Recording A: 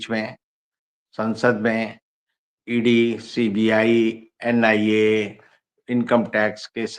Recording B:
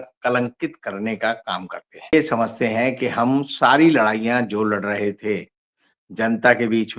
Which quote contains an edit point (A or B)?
B